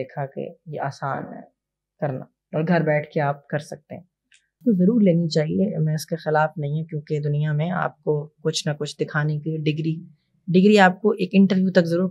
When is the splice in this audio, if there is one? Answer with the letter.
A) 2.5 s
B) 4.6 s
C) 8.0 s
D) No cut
B